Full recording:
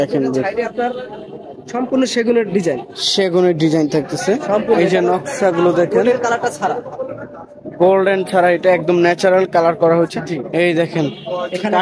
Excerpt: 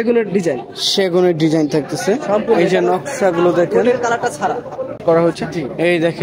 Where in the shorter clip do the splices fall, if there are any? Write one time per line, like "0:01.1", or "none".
0:05.0